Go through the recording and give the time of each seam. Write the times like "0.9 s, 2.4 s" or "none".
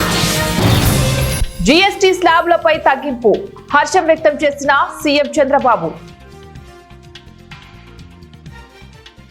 1.3 s